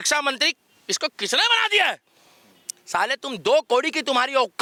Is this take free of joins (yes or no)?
yes